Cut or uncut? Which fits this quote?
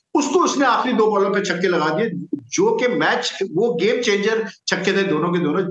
uncut